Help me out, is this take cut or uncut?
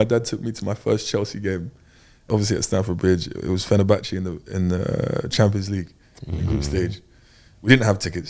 cut